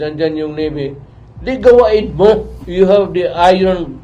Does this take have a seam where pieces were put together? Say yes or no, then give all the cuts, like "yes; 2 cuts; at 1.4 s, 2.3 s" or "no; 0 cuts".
yes; 1 cut; at 2.6 s